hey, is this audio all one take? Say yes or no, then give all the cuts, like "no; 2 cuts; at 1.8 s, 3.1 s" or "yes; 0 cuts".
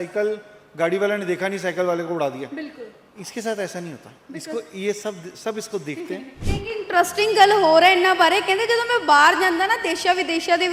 no; 1 cut; at 6.4 s